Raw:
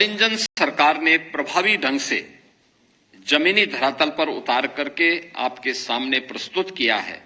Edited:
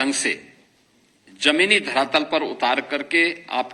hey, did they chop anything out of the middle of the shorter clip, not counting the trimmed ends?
no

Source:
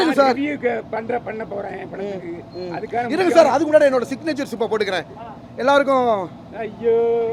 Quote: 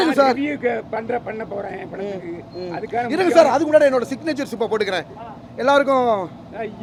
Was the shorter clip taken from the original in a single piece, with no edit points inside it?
yes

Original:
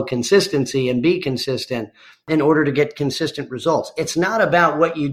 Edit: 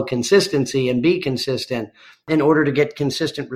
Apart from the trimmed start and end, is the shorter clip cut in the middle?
no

